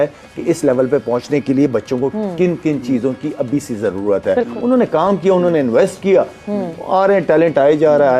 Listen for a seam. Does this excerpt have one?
no; 0 cuts

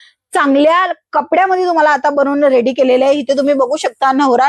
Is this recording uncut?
yes; 0 cuts

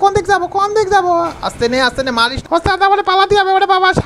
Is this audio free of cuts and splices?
no; 1 cut; at 2.5 s

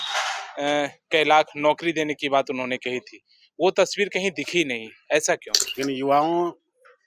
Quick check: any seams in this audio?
yes; 1 cut; at 5.6 s

